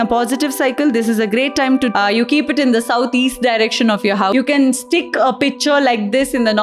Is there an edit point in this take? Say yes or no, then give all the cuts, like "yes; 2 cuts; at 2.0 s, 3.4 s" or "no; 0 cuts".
yes; 2 cuts; at 1.9 s, 4.3 s